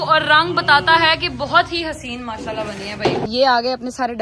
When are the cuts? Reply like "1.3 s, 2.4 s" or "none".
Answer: 3.3 s